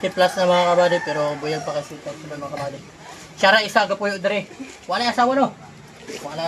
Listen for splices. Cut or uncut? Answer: uncut